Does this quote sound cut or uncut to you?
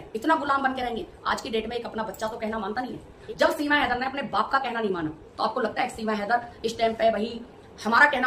cut